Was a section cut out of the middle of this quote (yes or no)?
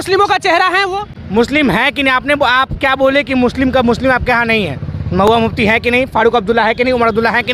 no